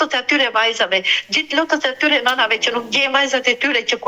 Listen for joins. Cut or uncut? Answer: uncut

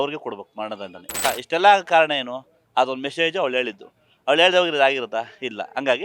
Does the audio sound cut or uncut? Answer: cut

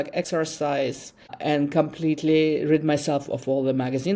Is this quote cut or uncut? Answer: uncut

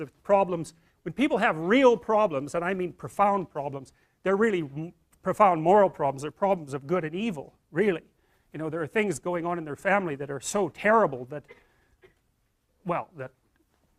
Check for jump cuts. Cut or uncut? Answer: cut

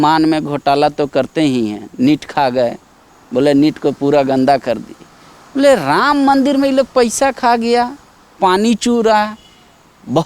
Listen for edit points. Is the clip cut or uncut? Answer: uncut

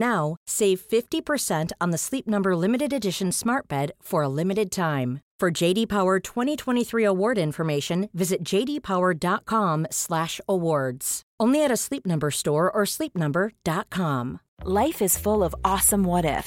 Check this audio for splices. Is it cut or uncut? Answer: cut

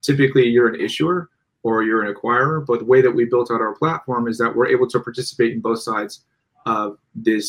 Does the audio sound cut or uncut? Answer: uncut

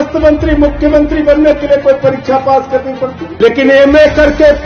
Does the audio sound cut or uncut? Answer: cut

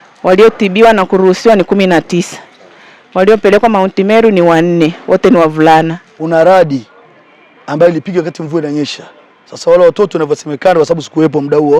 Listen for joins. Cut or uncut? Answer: cut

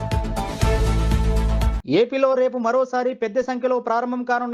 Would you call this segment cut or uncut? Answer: cut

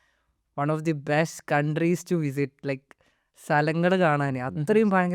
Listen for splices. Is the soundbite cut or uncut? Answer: uncut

